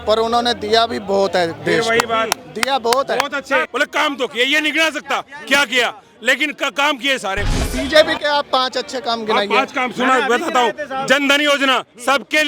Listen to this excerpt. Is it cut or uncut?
cut